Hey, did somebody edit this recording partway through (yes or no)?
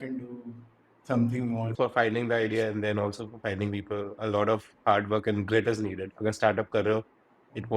yes